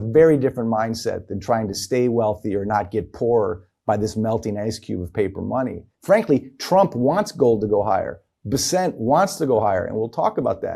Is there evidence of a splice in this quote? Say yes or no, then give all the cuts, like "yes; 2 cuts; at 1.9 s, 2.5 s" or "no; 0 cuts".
yes; 1 cut; at 5.9 s